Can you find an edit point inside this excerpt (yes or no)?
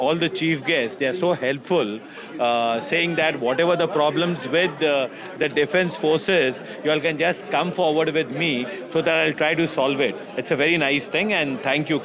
no